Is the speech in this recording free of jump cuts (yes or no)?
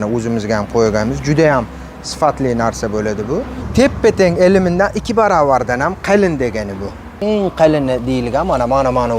no